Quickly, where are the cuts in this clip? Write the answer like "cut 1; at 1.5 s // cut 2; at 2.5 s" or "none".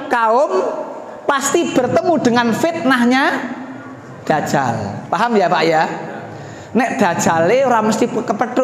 none